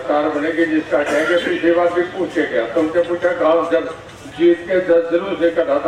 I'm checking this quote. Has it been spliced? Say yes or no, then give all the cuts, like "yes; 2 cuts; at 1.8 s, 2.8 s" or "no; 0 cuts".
no; 0 cuts